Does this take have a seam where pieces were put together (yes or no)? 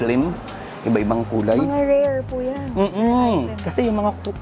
no